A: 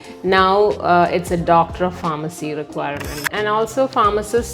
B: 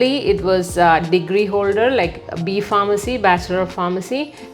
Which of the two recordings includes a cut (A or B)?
A